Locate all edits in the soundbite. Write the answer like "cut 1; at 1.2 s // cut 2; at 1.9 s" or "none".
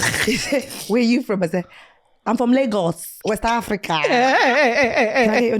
cut 1; at 3.1 s